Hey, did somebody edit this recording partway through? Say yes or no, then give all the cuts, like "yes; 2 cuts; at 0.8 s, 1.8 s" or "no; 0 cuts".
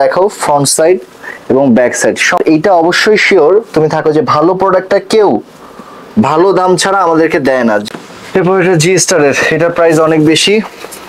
yes; 2 cuts; at 2.4 s, 7.8 s